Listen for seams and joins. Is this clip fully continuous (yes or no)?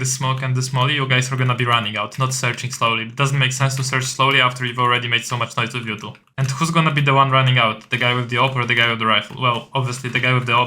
no